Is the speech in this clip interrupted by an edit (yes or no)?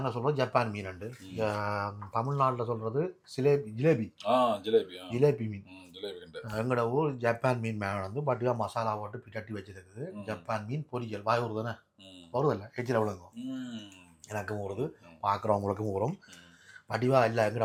no